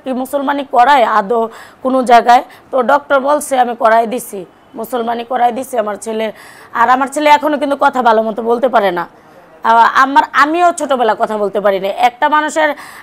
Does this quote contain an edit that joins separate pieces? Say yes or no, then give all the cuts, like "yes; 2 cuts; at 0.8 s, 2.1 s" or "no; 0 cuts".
no; 0 cuts